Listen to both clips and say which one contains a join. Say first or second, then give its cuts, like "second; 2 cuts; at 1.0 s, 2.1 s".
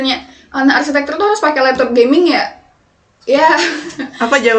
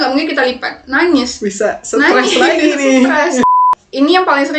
second; 1 cut; at 3.5 s